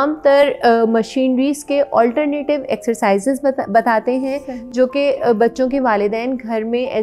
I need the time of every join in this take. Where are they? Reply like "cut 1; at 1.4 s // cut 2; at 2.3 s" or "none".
none